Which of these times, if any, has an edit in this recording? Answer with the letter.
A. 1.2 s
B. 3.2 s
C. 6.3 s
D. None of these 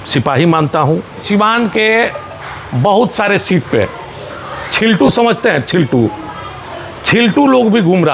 A